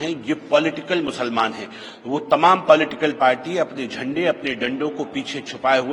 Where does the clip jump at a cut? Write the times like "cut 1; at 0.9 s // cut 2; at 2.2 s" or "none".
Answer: none